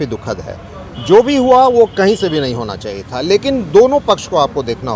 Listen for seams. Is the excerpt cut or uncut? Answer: uncut